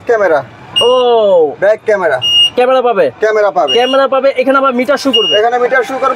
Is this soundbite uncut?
yes; 0 cuts

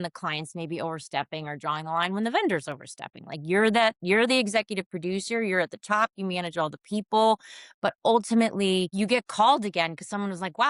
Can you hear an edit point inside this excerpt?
yes; 1 cut; at 8.9 s

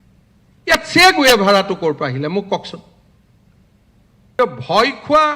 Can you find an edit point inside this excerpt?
yes; 1 cut; at 4.4 s

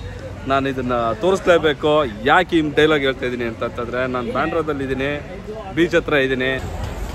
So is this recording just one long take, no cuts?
yes; 0 cuts

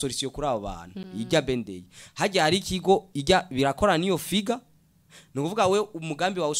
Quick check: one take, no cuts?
no; 1 cut; at 0.9 s

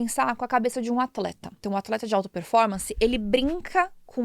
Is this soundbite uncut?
no; 1 cut; at 1.6 s

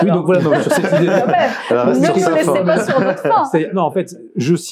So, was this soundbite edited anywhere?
no; 0 cuts

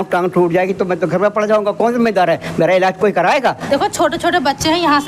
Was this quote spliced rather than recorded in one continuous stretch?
yes; 1 cut; at 3.6 s

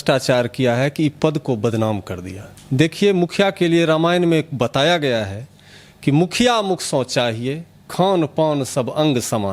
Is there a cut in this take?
no; 0 cuts

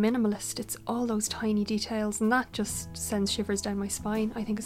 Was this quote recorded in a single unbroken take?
yes; 0 cuts

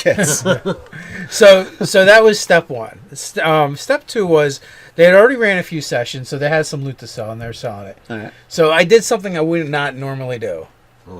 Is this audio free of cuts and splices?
no; 1 cut; at 6.6 s

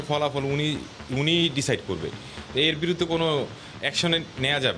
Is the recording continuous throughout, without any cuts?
yes; 0 cuts

